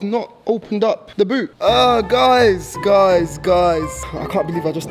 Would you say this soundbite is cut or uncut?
cut